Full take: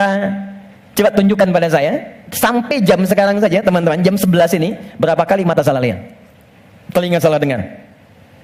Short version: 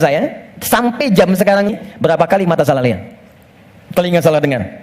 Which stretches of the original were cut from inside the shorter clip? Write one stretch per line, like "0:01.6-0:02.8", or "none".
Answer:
0:03.4-0:04.7